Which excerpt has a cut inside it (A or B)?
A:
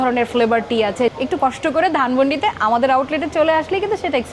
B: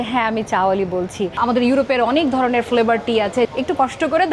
B